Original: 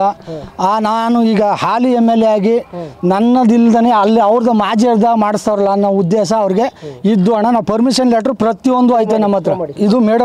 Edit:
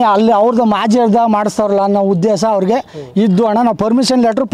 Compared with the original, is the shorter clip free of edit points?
yes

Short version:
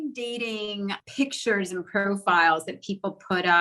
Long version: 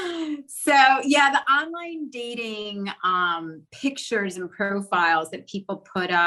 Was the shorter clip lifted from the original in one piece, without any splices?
no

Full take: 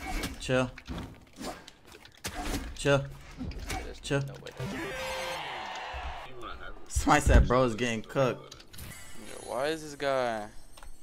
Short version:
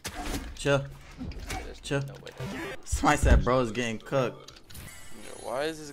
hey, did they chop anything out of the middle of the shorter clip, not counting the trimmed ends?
yes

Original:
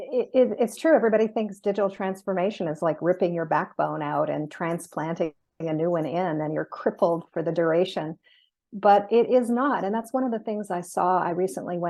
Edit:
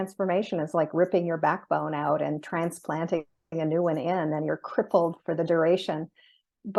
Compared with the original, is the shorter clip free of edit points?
yes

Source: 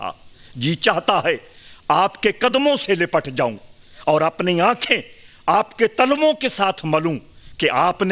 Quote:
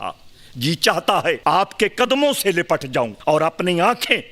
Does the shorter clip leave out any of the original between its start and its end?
yes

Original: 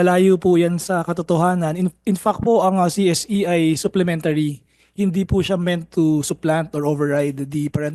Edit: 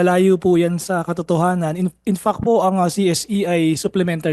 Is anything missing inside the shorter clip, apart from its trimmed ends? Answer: no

